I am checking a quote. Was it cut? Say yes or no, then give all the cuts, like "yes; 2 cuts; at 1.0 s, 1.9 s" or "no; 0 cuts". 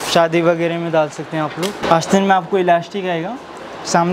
yes; 1 cut; at 1.8 s